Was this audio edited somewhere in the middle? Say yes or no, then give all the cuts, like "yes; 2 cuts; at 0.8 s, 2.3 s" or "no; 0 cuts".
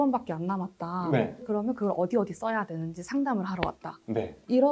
no; 0 cuts